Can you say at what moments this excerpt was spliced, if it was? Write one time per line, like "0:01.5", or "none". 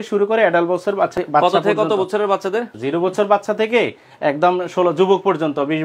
0:01.1
0:02.7